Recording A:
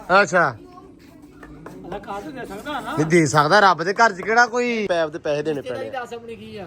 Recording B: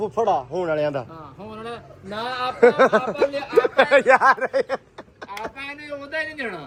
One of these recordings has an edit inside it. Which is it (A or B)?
A